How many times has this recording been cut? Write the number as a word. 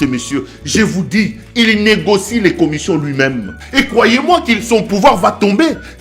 one